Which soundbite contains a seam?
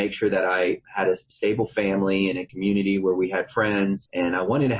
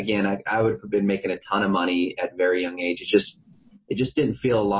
first; 3 cuts; at 1.3 s, 2.5 s, 4.0 s

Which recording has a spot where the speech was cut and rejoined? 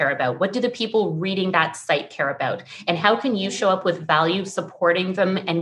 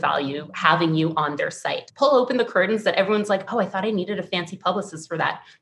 second; 1 cut; at 1.8 s

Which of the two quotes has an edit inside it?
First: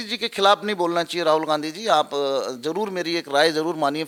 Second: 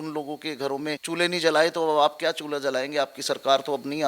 second; 1 cut; at 1.0 s

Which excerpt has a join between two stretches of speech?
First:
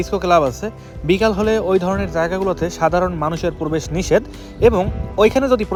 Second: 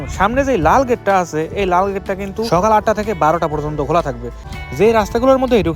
second; 1 cut; at 4.5 s

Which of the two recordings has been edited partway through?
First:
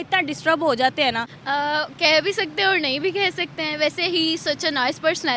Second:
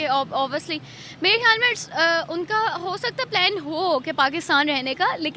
first; 1 cut; at 1.3 s

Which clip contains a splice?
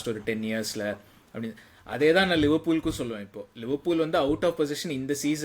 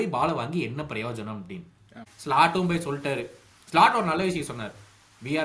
second; 1 cut; at 2.0 s

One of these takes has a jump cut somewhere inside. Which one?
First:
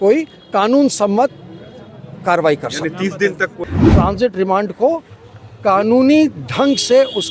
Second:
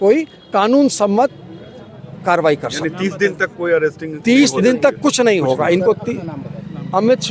first; 1 cut; at 3.6 s

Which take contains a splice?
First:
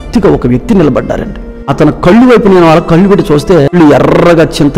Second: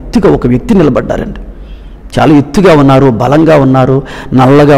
first; 2 cuts; at 1.7 s, 3.7 s

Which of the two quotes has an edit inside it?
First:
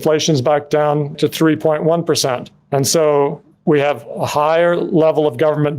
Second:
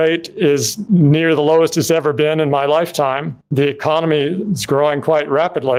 first; 1 cut; at 1.2 s

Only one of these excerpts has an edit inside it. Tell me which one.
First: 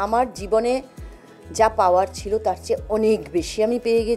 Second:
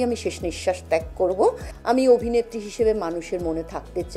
second; 1 cut; at 1.7 s

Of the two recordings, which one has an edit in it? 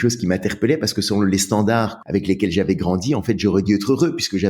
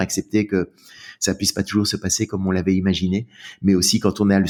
first; 1 cut; at 2.0 s

